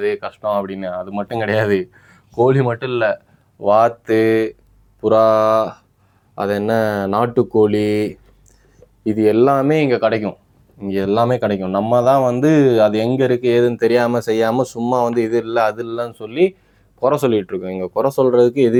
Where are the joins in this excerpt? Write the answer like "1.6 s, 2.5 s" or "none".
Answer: none